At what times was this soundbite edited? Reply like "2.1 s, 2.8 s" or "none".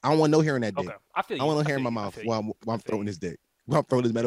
1.0 s